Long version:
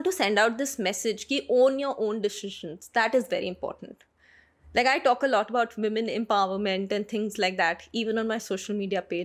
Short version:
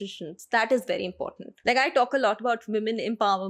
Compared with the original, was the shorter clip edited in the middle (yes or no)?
yes